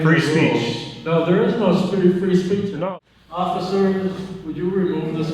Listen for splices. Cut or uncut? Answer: cut